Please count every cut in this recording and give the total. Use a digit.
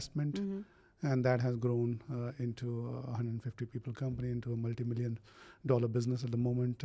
0